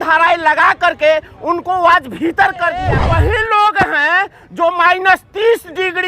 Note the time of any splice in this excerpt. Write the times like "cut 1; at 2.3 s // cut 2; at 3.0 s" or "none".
cut 1; at 3.0 s